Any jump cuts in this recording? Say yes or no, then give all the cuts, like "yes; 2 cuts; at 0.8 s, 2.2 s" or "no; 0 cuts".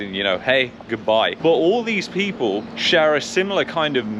yes; 1 cut; at 1.4 s